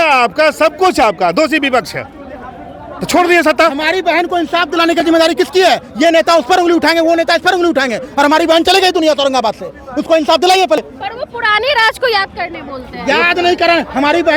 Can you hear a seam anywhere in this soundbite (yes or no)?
no